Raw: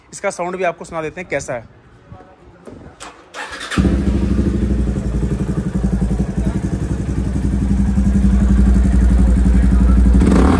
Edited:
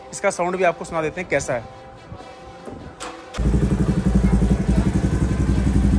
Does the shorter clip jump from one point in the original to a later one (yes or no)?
yes